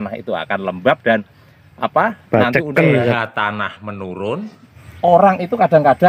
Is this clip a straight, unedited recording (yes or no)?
no